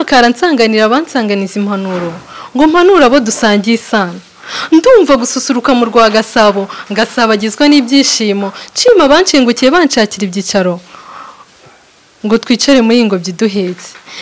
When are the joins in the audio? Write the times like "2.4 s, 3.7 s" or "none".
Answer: none